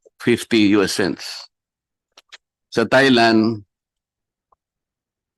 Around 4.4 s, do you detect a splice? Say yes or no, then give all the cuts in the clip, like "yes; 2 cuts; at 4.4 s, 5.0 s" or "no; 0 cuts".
no; 0 cuts